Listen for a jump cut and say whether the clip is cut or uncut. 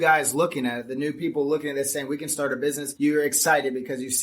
cut